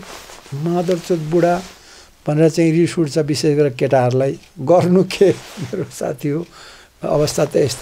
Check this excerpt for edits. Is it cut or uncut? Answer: uncut